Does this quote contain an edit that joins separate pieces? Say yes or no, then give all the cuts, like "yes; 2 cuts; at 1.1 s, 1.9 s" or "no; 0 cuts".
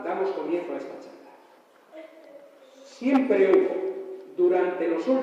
no; 0 cuts